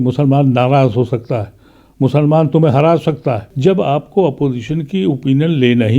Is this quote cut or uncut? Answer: cut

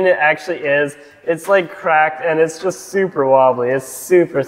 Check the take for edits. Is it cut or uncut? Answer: uncut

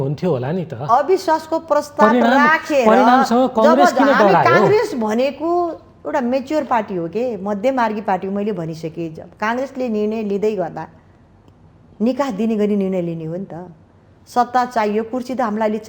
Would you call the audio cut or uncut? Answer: uncut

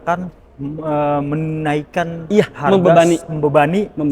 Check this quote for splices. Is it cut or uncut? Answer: uncut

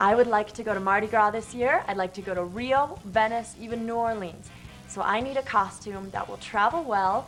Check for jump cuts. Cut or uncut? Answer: uncut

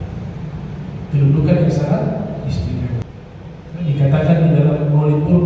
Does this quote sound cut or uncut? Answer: cut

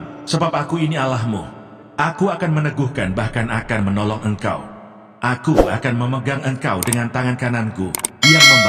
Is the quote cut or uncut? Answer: uncut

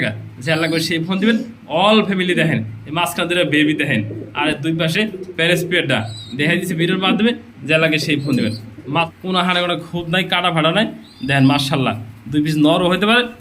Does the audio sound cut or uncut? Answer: cut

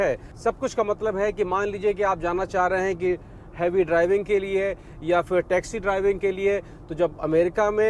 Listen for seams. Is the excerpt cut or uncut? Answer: uncut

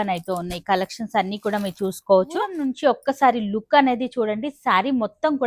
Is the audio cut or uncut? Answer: cut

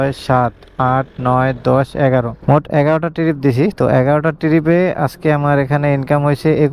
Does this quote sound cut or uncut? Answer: uncut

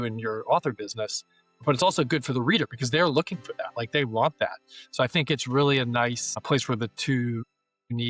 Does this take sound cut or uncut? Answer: uncut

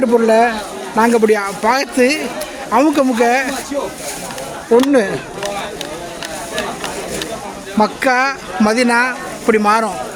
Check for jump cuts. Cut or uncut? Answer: uncut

